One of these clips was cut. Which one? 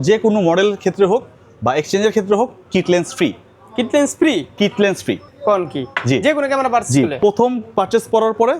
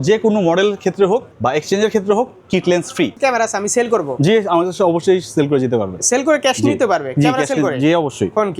second; 2 cuts; at 1.3 s, 3.1 s

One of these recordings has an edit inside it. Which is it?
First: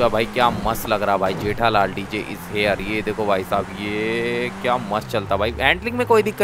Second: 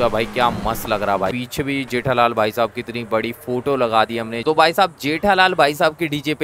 second; 2 cuts; at 1.3 s, 4.3 s

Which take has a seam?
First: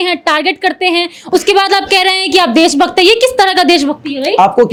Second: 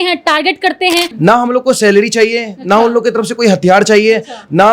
second; 1 cut; at 1.1 s

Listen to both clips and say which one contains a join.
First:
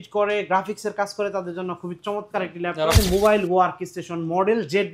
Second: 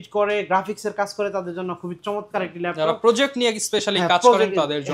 first; 1 cut; at 3.0 s

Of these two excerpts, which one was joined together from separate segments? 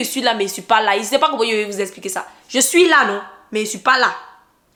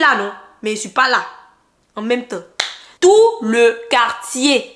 second; 1 cut; at 2.8 s

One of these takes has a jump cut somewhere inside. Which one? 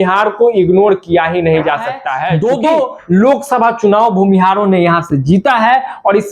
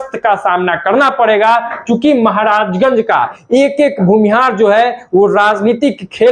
first; 1 cut; at 2.2 s

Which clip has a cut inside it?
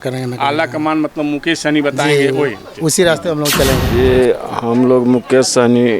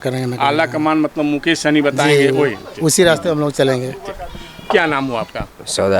first; 1 cut; at 3.8 s

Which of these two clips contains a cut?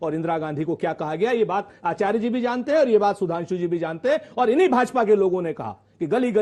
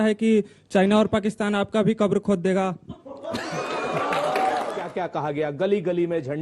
second; 1 cut; at 4.9 s

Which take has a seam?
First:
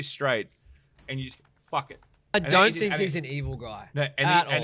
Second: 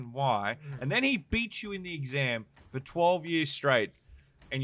first; 1 cut; at 2.3 s

